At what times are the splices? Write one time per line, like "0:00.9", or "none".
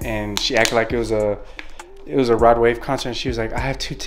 none